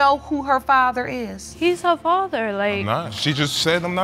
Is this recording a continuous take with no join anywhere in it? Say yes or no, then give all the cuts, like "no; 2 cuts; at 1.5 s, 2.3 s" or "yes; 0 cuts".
no; 2 cuts; at 1.4 s, 3.1 s